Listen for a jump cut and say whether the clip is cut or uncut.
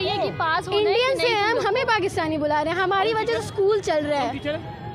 uncut